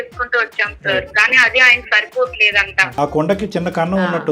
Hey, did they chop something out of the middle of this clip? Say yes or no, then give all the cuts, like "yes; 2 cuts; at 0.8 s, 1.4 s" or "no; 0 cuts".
yes; 1 cut; at 2.9 s